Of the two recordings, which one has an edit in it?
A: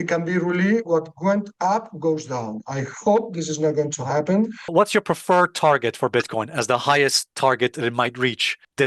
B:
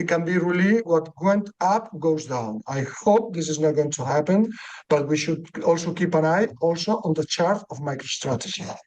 A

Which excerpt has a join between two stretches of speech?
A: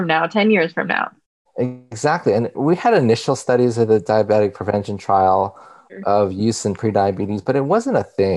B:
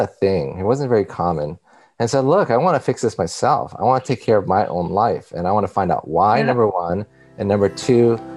A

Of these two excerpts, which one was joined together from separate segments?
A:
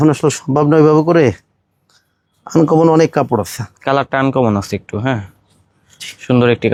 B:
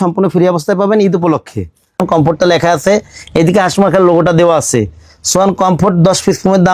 B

